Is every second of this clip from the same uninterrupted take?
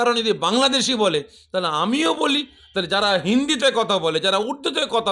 yes; 0 cuts

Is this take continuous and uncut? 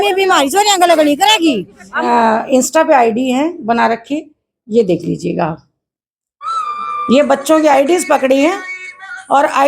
no; 1 cut; at 1.6 s

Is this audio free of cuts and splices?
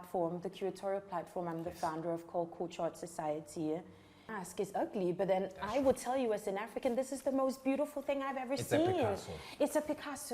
no; 1 cut; at 4.3 s

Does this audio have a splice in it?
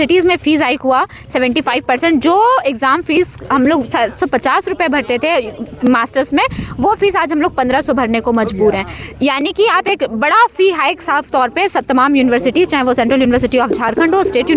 no; 0 cuts

